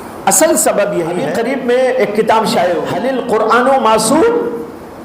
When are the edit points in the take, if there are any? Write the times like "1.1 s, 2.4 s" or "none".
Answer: 1.3 s, 3.0 s